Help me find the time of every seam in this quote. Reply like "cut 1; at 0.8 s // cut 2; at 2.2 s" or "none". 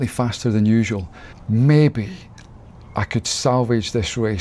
cut 1; at 1.3 s